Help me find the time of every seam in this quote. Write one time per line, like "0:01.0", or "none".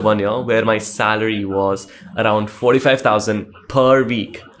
none